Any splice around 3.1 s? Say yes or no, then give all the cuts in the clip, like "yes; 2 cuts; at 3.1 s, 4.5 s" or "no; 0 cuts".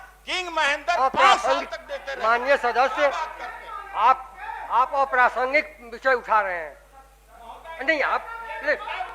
no; 0 cuts